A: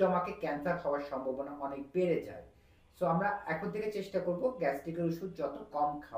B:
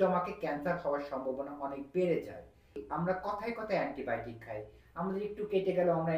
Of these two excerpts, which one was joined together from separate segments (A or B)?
B